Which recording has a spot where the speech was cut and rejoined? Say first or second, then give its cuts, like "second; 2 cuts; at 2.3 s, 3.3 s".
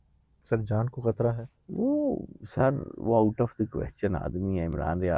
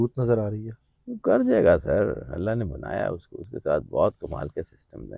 first; 1 cut; at 1.5 s